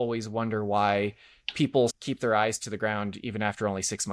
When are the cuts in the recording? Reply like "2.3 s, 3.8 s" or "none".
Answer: 1.9 s